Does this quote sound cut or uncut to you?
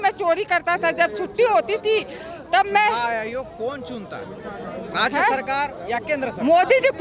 uncut